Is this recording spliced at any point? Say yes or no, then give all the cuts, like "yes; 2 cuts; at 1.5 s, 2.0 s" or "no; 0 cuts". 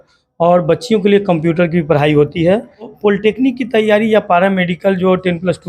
yes; 1 cut; at 2.9 s